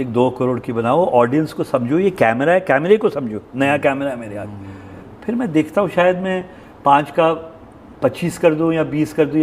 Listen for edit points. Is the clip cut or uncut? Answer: cut